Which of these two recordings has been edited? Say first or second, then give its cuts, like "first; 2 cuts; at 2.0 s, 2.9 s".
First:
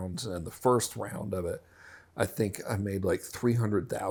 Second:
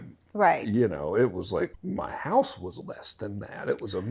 second; 1 cut; at 1.8 s